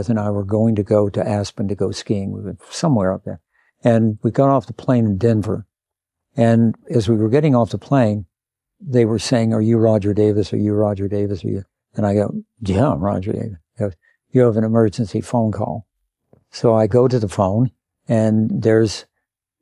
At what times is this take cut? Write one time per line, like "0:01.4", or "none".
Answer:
none

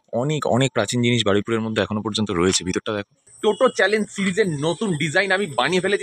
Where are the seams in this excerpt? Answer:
0:03.3

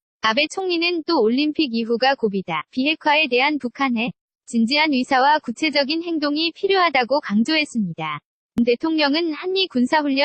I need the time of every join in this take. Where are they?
0:08.6

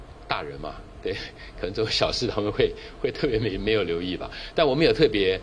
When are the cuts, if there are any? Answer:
none

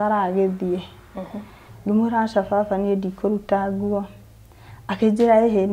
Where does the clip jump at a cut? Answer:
0:01.7

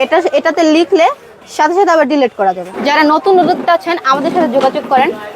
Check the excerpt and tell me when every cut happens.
0:02.7

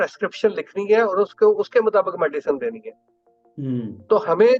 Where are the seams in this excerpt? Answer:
none

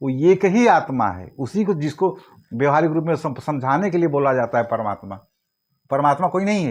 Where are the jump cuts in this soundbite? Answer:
none

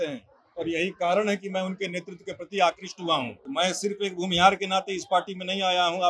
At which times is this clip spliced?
0:03.4

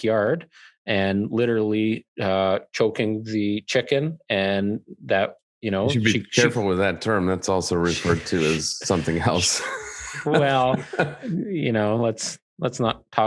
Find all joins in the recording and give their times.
0:10.2

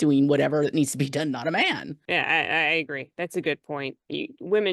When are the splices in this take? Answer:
0:02.0

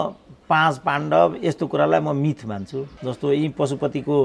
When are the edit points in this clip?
0:02.9

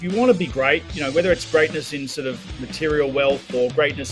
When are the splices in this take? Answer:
0:00.9

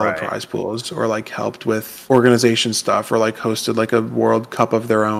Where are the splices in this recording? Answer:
none

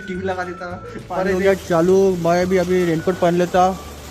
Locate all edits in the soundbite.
0:01.2

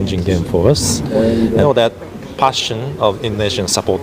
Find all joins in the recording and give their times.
0:01.6

